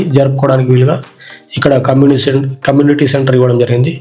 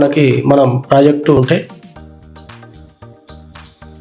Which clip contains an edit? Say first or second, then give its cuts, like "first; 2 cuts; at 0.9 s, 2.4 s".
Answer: second; 1 cut; at 1.4 s